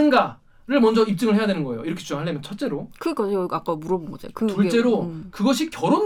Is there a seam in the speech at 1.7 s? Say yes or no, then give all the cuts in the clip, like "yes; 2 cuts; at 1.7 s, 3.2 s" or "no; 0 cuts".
no; 0 cuts